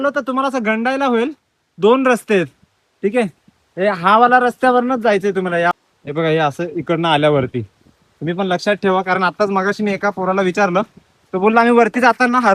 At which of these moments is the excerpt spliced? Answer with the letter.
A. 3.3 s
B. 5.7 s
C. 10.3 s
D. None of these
B